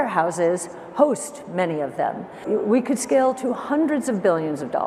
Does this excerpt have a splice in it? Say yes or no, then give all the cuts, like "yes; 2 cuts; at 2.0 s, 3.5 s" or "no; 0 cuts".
yes; 1 cut; at 2.4 s